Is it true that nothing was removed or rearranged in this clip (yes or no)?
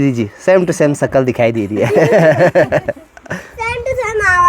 yes